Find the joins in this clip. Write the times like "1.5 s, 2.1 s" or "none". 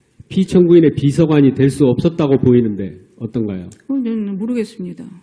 1.0 s